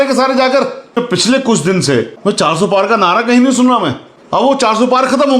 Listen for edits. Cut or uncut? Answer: cut